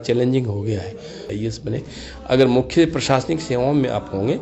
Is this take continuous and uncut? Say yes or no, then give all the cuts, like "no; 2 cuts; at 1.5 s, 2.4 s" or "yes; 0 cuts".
no; 1 cut; at 1.2 s